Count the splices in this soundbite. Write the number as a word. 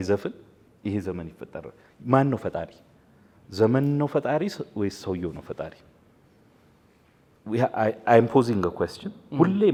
zero